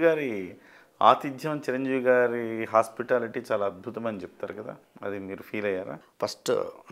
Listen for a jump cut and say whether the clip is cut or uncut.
cut